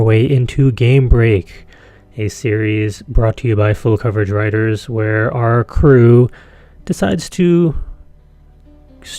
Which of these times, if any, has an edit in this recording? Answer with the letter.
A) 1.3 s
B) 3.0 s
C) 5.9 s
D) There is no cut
C